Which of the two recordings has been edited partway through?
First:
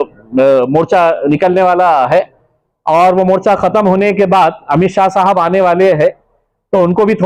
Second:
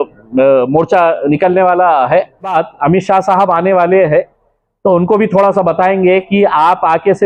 second; 1 cut; at 2.5 s

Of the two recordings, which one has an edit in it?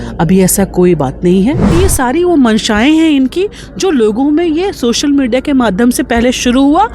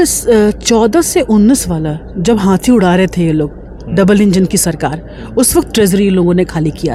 first; 1 cut; at 1.7 s

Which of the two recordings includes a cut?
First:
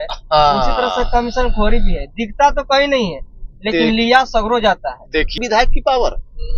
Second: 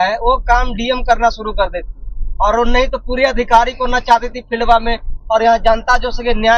first; 1 cut; at 5.4 s

